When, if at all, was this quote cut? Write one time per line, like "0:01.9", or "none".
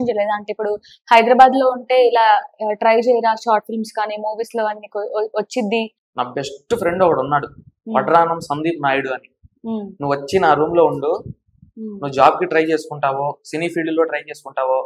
0:06.0